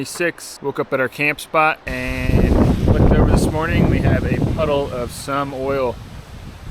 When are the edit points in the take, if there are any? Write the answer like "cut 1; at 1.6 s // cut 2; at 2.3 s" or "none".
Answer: cut 1; at 1.9 s